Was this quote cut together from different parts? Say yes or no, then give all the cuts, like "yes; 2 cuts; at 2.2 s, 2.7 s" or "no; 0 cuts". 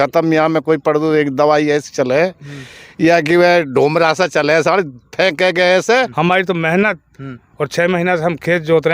yes; 1 cut; at 6.1 s